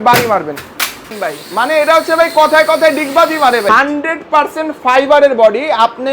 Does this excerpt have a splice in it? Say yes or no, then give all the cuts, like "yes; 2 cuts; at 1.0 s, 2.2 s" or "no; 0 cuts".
yes; 2 cuts; at 1.2 s, 3.7 s